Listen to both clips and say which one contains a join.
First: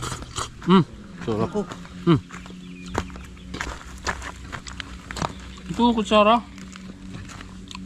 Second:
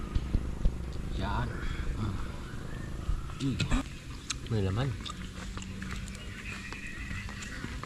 second; 1 cut; at 3.8 s

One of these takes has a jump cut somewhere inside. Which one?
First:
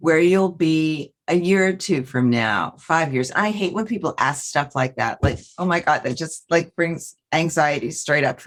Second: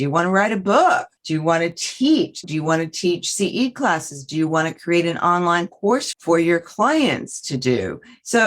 second; 3 cuts; at 1.1 s, 2.5 s, 6.1 s

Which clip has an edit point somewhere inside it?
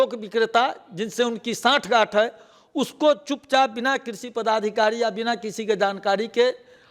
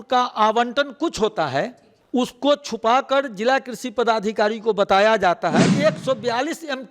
second; 1 cut; at 5.7 s

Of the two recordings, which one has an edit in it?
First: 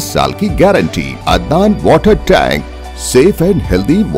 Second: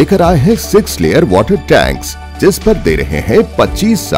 first; 1 cut; at 1.1 s

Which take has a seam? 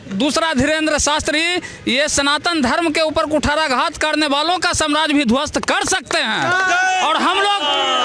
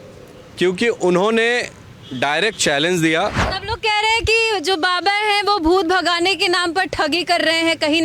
second; 1 cut; at 3.6 s

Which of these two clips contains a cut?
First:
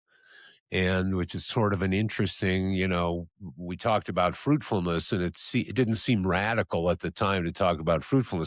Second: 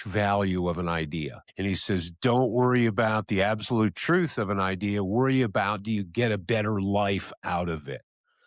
second; 1 cut; at 1.4 s

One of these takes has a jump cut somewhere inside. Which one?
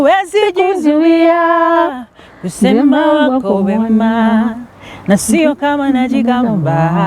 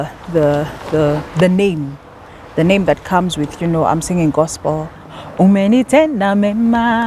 second; 1 cut; at 5.0 s

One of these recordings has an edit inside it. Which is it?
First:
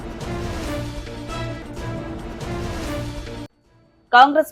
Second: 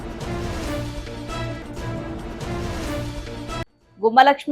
second; 1 cut; at 3.4 s

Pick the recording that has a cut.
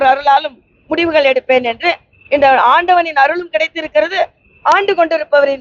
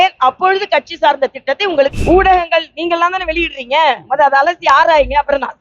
second; 1 cut; at 2.0 s

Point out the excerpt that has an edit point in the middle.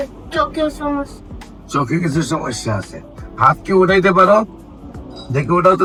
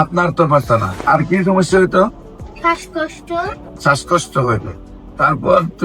second; 2 cuts; at 1.0 s, 3.7 s

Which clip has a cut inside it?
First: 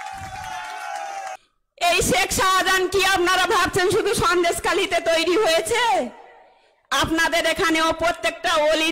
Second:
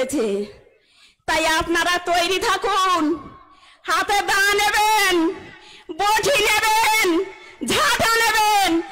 first; 1 cut; at 1.4 s

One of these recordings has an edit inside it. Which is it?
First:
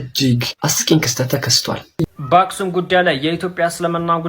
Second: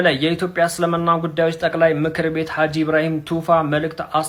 first; 1 cut; at 2.0 s

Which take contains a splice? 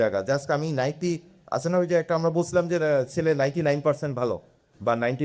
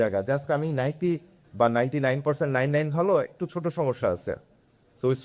second; 1 cut; at 1.3 s

